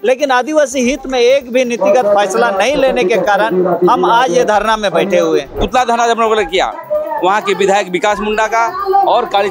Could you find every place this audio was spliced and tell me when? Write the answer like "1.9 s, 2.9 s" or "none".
5.6 s